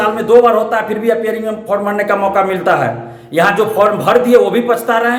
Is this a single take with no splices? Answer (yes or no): yes